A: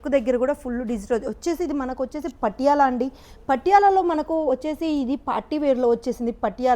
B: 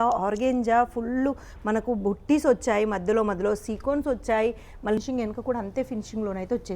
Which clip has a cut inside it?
B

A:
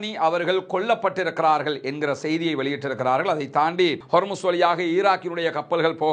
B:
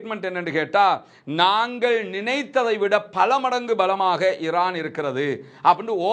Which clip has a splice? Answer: A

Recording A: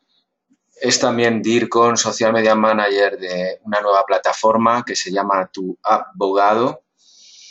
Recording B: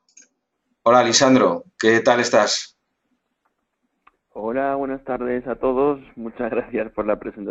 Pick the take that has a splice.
A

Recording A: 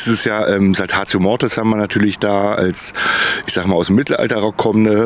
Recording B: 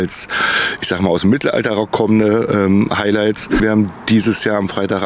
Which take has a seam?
B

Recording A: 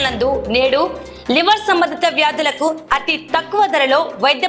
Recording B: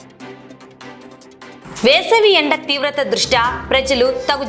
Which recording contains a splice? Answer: B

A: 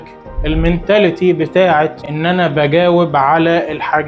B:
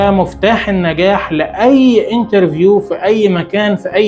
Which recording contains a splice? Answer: A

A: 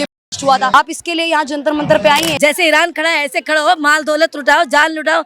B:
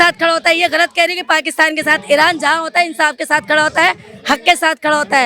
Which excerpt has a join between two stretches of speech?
A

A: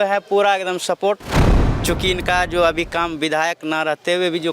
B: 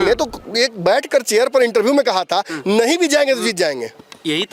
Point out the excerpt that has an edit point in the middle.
A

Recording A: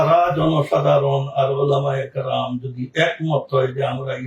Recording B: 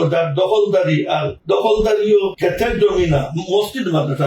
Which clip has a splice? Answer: B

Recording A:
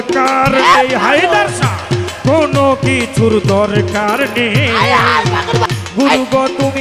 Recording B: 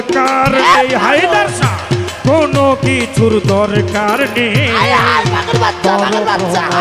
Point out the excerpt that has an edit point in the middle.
A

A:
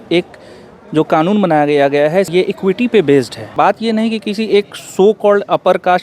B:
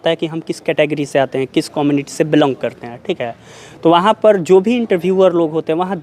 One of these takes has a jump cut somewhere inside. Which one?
A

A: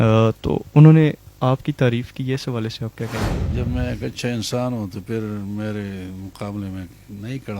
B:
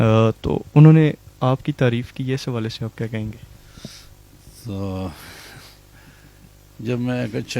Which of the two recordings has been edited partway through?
A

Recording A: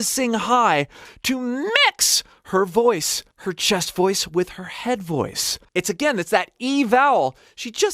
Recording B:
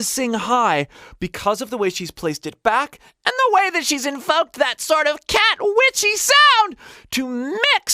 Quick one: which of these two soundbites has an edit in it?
A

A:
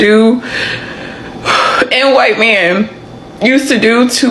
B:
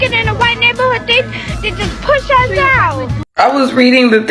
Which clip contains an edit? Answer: B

